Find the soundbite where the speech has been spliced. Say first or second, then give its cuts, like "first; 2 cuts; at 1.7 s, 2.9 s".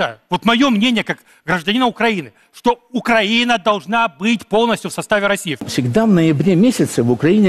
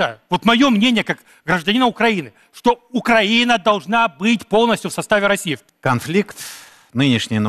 first; 1 cut; at 5.7 s